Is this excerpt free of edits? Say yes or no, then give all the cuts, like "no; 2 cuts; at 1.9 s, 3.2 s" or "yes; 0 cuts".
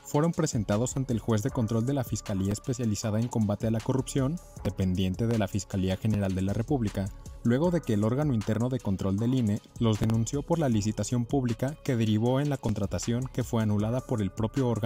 yes; 0 cuts